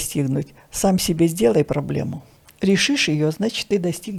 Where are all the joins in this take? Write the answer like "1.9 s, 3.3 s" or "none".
none